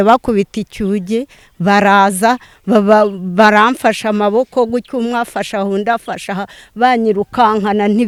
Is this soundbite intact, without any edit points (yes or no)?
yes